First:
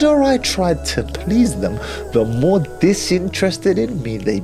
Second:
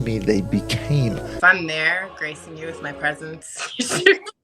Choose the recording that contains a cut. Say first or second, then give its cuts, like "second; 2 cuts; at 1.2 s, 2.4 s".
second; 1 cut; at 1.3 s